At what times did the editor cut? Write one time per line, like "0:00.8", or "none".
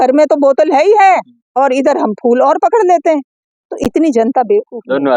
none